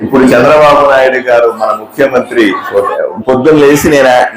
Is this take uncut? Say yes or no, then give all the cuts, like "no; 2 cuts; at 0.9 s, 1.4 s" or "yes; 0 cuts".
no; 1 cut; at 3.0 s